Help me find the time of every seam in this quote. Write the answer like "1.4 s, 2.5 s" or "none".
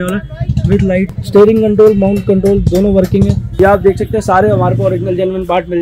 1.2 s, 3.4 s